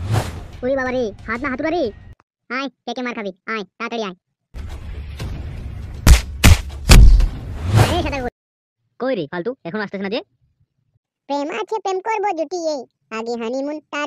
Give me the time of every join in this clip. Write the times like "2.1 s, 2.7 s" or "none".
8.4 s